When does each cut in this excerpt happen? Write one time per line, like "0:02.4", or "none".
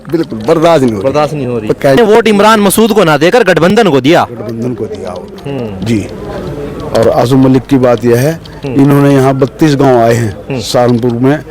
0:02.0